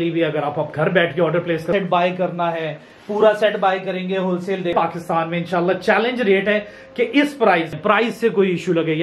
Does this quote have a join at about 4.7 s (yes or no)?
yes